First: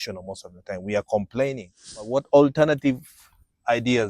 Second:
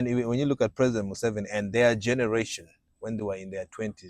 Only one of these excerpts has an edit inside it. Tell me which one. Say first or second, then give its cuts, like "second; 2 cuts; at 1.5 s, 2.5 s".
first; 1 cut; at 2.1 s